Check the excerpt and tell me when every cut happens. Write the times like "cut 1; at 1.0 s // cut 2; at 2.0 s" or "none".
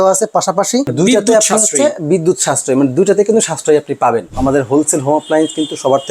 cut 1; at 0.9 s // cut 2; at 4.3 s